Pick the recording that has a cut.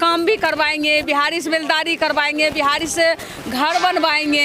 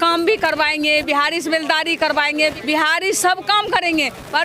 second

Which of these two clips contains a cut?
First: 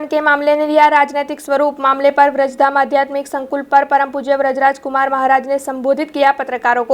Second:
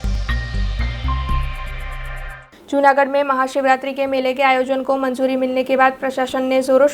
second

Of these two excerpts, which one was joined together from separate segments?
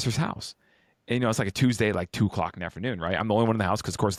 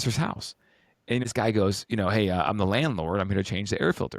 second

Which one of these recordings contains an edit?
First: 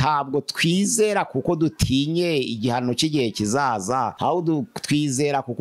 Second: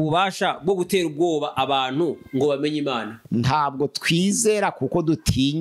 first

